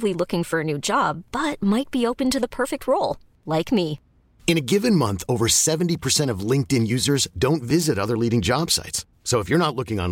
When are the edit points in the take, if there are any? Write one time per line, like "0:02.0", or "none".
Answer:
none